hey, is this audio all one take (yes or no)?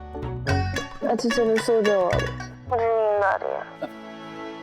no